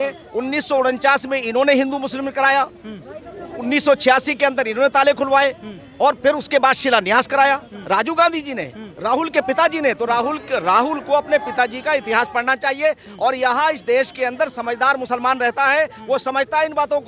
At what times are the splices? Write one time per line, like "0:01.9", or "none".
none